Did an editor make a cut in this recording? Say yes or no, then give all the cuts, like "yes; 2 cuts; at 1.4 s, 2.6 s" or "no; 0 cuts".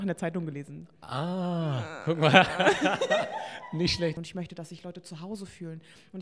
yes; 1 cut; at 4.2 s